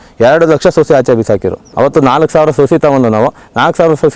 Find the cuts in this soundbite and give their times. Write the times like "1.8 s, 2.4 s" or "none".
1.6 s

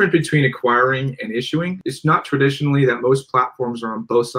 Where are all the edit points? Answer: 1.8 s

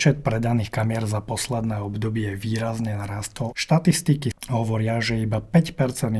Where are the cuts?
3.5 s, 4.3 s

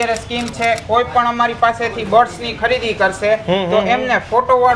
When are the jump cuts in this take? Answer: none

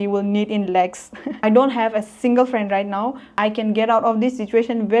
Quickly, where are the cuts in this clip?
1.3 s, 3.3 s

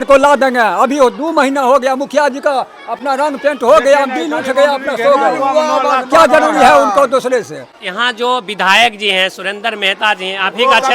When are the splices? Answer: none

